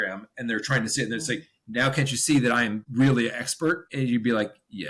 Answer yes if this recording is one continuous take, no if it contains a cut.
no